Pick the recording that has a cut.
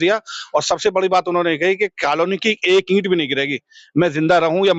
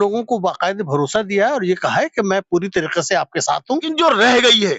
second; 1 cut; at 3.9 s

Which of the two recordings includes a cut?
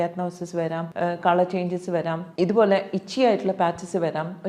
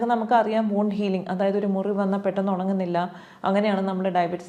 first; 2 cuts; at 0.9 s, 2.2 s

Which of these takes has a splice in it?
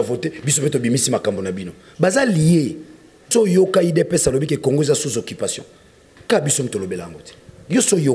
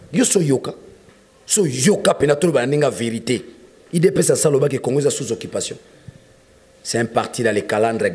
first; 1 cut; at 3.3 s

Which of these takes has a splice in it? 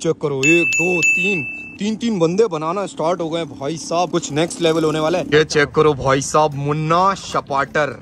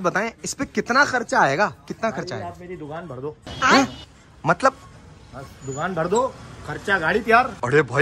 first; 1 cut; at 5.3 s

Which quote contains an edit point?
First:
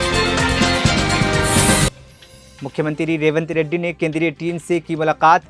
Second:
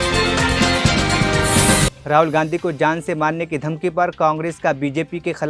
second; 1 cut; at 2.0 s

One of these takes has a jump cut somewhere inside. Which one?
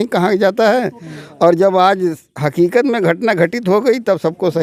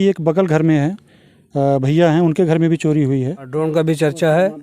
second; 1 cut; at 3.5 s

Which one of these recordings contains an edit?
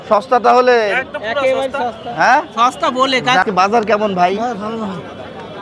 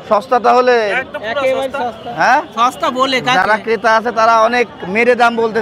first; 1 cut; at 3.4 s

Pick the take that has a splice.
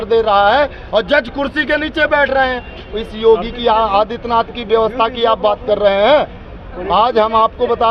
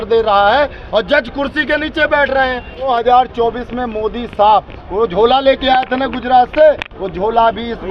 second; 1 cut; at 2.9 s

